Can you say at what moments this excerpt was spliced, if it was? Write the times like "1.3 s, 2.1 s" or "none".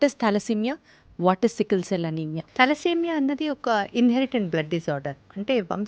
2.4 s